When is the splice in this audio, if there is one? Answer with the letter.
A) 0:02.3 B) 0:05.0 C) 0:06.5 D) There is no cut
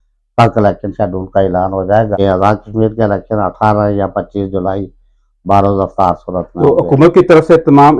D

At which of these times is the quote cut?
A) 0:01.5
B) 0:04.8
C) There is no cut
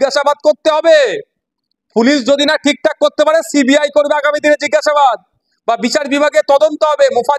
C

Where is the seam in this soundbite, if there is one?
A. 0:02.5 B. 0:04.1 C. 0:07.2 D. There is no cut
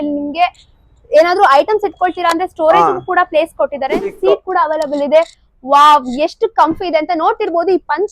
B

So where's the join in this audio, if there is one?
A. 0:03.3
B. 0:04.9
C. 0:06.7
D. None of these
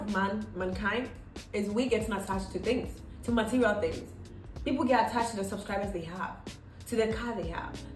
D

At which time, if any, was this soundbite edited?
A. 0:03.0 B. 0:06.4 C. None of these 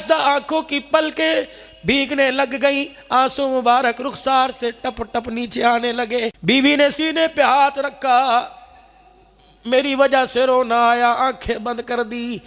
B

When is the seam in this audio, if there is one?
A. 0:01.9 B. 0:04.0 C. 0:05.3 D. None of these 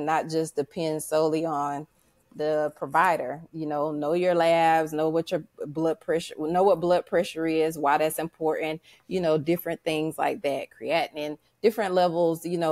D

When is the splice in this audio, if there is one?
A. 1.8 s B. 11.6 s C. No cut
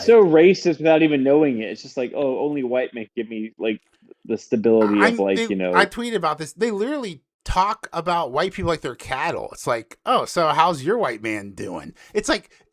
C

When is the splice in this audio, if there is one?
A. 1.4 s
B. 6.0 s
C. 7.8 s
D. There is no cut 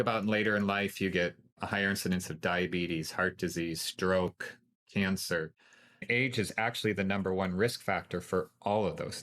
B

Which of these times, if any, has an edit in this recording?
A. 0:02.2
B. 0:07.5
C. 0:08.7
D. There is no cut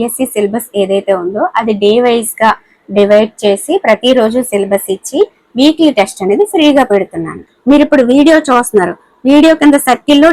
B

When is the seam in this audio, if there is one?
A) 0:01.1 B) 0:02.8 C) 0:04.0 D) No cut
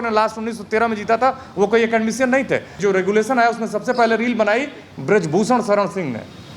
B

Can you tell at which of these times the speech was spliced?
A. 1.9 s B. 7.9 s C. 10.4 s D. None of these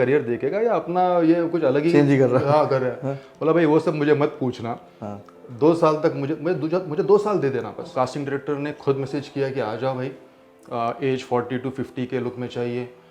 B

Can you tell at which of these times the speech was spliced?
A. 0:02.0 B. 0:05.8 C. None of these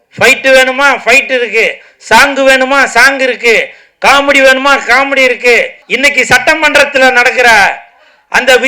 B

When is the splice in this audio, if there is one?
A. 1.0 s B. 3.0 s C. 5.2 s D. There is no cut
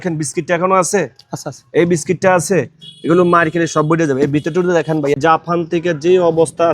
C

